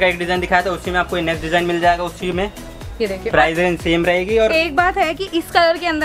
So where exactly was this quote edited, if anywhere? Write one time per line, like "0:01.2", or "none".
none